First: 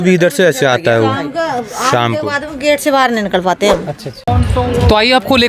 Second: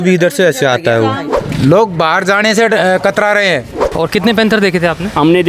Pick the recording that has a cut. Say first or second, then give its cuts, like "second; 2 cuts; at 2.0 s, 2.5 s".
second; 2 cuts; at 1.3 s, 3.8 s